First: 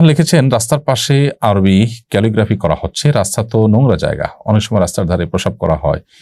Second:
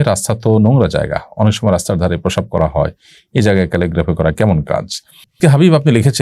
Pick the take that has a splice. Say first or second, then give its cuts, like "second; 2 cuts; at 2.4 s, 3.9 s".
second; 1 cut; at 5.3 s